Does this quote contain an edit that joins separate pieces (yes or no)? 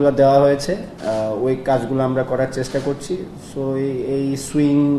no